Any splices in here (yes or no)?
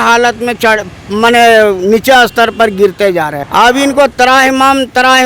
yes